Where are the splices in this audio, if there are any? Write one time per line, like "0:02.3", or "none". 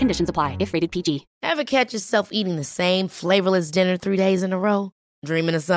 0:01.3